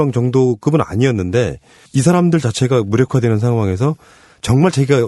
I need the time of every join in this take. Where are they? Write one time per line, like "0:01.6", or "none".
none